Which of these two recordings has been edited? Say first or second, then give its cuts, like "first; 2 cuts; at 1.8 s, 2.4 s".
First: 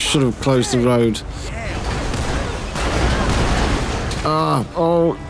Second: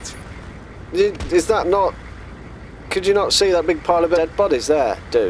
second; 1 cut; at 4.2 s